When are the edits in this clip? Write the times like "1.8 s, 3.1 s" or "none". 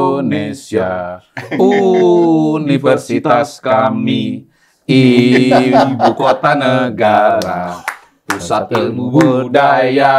none